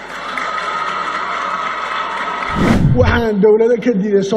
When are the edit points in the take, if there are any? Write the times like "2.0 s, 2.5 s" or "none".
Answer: 2.7 s